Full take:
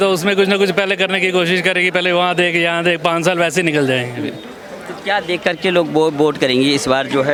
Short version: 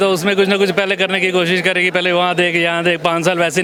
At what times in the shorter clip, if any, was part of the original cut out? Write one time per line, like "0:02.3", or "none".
none